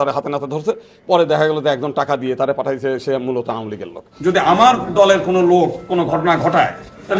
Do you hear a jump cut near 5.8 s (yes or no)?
no